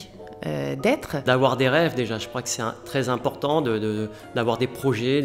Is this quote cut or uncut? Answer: cut